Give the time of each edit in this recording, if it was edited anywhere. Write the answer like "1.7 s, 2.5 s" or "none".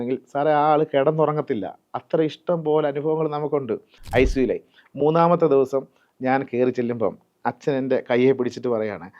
3.9 s